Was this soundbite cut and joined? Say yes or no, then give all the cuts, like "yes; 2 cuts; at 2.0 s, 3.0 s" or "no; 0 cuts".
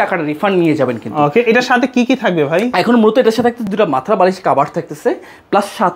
no; 0 cuts